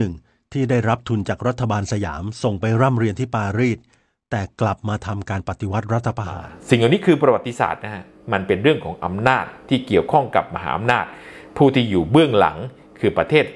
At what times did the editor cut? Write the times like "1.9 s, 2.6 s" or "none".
6.5 s